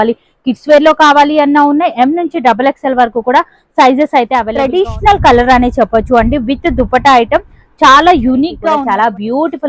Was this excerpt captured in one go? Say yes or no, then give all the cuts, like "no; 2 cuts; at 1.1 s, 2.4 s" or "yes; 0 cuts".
no; 2 cuts; at 4.6 s, 8.6 s